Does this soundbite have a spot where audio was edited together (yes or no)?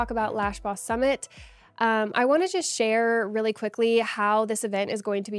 no